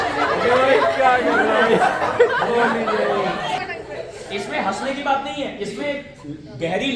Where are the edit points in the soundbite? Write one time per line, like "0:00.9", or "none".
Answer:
0:03.6